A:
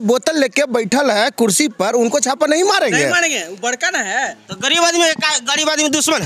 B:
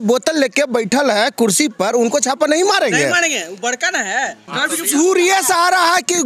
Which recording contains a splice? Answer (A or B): B